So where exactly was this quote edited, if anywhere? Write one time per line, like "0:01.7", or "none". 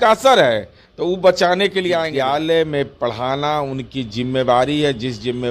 0:02.1